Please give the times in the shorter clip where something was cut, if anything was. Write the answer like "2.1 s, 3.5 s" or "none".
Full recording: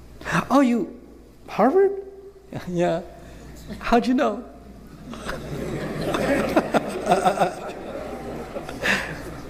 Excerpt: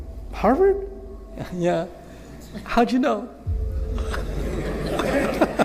none